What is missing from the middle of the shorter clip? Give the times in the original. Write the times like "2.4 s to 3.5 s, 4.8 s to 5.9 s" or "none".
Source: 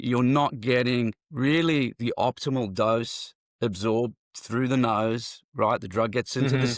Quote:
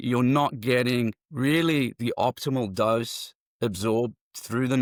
none